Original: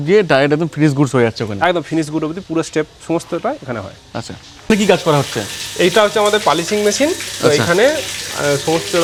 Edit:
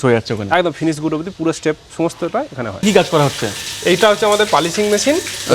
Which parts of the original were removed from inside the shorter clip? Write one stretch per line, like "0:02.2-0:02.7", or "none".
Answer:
0:03.9-0:04.8